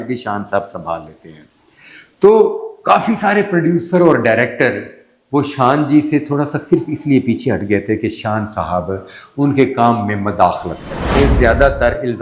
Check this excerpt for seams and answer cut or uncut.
cut